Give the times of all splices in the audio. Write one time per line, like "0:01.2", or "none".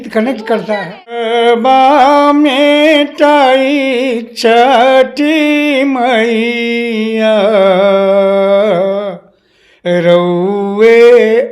0:01.3